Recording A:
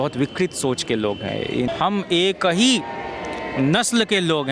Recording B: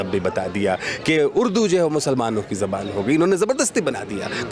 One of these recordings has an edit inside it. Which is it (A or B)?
A